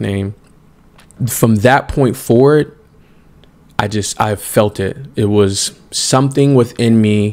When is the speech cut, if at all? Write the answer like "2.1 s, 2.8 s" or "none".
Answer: 1.2 s